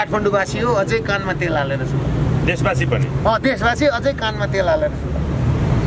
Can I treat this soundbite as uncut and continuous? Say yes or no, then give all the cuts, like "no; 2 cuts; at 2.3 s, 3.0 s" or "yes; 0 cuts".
yes; 0 cuts